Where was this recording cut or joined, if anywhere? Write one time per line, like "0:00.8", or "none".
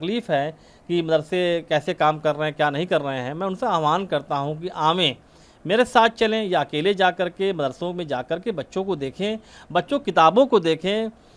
none